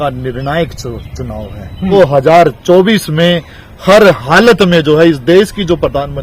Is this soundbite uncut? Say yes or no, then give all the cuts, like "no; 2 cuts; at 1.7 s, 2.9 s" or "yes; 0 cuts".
no; 1 cut; at 1.9 s